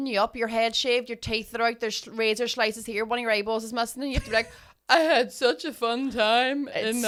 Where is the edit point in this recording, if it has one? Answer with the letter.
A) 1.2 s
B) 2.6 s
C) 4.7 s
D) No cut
D